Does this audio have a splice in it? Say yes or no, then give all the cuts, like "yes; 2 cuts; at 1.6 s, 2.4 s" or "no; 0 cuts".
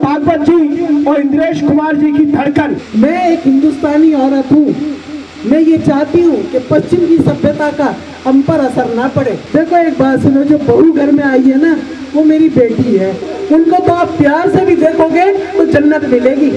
yes; 3 cuts; at 2.8 s, 9.4 s, 13.3 s